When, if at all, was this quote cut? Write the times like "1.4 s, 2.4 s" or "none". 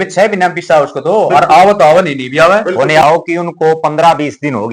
3.0 s